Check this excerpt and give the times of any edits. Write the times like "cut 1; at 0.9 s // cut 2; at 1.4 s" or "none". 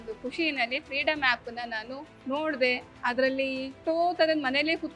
cut 1; at 2.1 s // cut 2; at 3.8 s